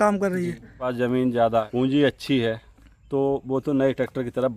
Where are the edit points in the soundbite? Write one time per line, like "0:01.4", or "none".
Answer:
0:00.9
0:01.7

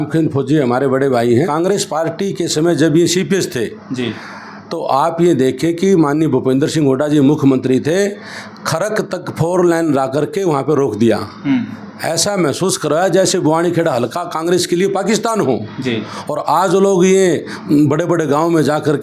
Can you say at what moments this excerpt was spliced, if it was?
0:01.5

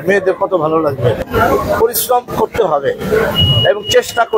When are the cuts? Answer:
0:01.2

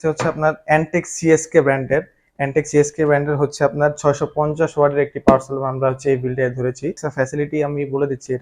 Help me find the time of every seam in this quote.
0:07.0

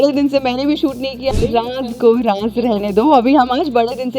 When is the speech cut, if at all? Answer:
0:01.3

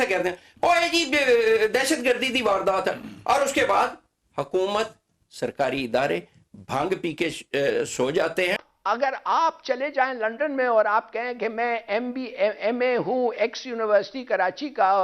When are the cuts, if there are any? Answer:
0:08.7

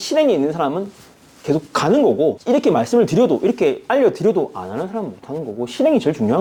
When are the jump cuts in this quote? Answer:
none

